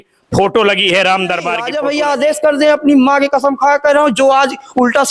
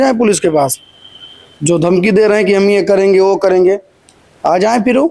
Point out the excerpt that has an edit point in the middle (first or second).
first